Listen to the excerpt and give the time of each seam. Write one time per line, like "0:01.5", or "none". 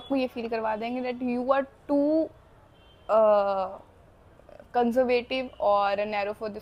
none

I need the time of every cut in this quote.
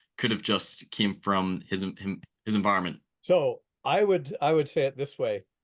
0:03.0

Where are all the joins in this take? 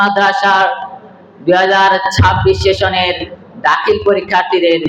none

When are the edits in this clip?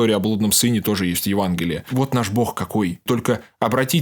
0:01.9
0:03.0

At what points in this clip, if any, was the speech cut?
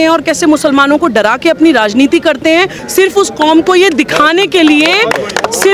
0:02.8

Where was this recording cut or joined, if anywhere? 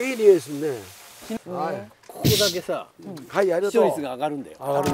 0:01.4

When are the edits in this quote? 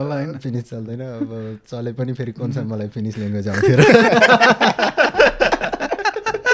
none

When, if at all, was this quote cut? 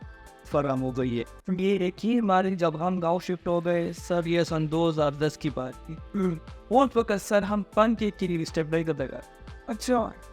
0:01.6

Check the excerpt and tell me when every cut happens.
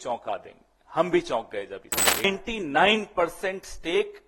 0:02.2

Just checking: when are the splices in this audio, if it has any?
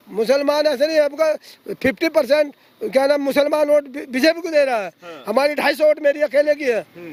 none

